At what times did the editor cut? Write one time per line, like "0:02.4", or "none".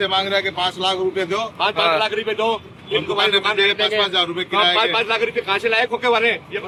none